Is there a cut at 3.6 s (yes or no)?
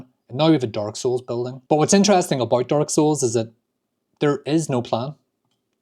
no